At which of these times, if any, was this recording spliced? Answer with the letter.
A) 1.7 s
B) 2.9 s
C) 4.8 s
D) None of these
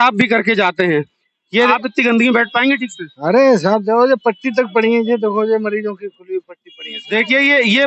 A